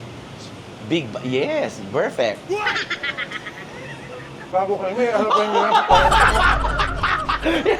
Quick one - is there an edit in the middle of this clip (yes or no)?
yes